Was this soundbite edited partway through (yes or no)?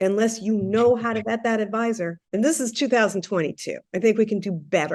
yes